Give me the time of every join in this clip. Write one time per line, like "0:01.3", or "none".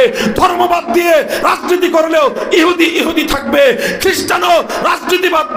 none